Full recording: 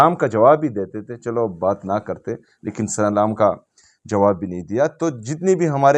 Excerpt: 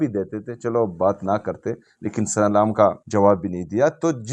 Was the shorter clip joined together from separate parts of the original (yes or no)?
yes